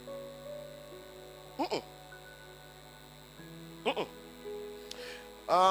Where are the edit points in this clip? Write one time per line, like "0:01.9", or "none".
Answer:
none

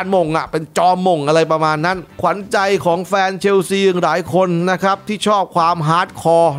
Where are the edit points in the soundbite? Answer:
0:02.1

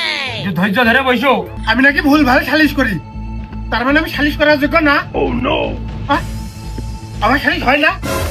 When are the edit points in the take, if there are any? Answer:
0:01.5

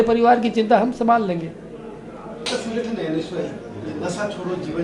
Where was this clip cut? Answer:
0:02.5

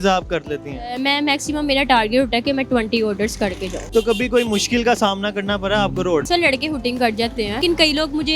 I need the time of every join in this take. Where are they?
0:03.7
0:06.3
0:07.6

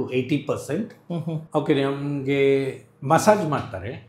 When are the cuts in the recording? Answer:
0:01.4

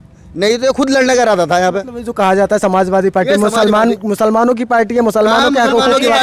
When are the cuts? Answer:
none

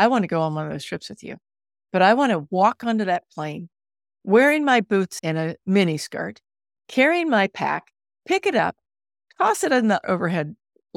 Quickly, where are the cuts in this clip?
0:05.2
0:10.0

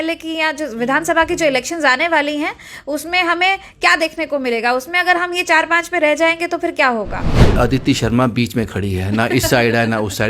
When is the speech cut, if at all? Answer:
0:07.5

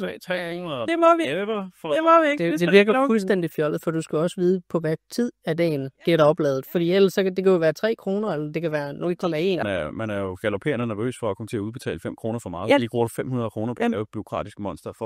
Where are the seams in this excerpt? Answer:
0:09.6

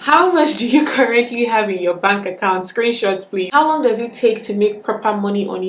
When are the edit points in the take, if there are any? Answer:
0:03.5

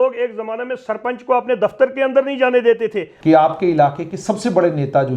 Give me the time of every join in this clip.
0:03.1

